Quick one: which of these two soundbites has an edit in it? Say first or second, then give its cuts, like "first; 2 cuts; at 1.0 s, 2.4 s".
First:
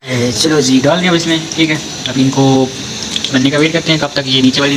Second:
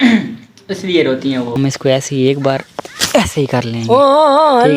second; 1 cut; at 1.6 s